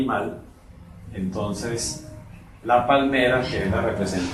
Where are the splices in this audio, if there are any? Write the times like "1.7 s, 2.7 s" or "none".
none